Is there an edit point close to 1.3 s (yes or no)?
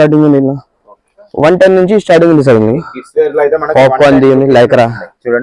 yes